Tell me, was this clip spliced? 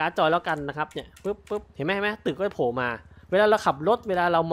no; 0 cuts

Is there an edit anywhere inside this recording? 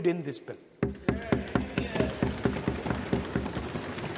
no; 0 cuts

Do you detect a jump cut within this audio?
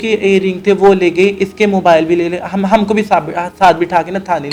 no; 0 cuts

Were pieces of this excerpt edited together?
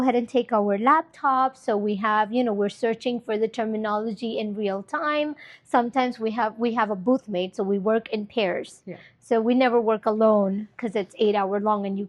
no; 0 cuts

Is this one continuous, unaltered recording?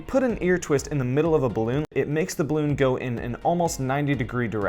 no; 1 cut; at 1.9 s

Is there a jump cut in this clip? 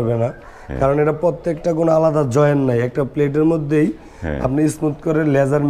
no; 0 cuts

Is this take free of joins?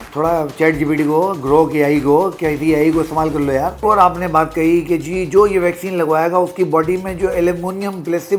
no; 1 cut; at 3.8 s

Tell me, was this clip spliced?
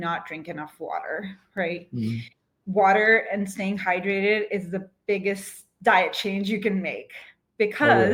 no; 0 cuts

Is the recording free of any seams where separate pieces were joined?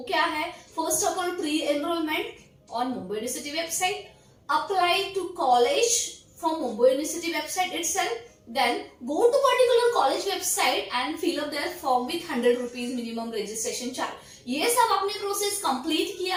yes; 0 cuts

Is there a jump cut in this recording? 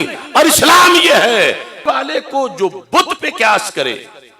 yes; 1 cut; at 1.8 s

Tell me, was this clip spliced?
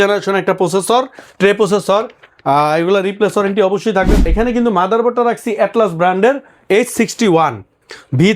yes; 1 cut; at 4.2 s

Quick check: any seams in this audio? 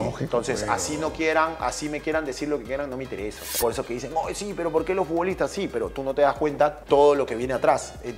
yes; 2 cuts; at 3.4 s, 6.8 s

